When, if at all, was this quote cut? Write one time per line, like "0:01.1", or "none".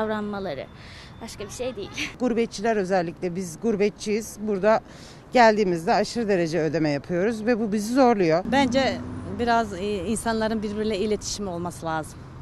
0:02.2
0:08.5